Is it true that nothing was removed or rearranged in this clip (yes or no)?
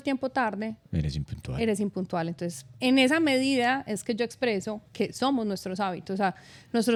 yes